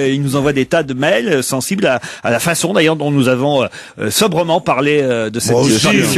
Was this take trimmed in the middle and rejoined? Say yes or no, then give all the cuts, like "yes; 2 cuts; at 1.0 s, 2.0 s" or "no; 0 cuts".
yes; 1 cut; at 4.8 s